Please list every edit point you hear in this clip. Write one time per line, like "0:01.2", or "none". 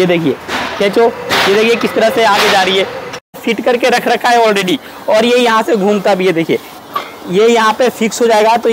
0:03.4